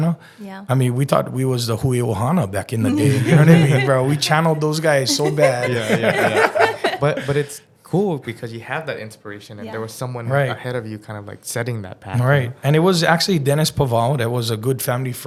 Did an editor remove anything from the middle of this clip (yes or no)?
no